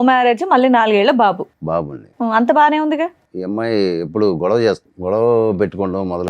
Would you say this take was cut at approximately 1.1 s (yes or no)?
no